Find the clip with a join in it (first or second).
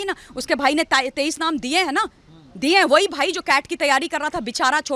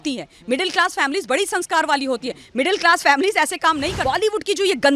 second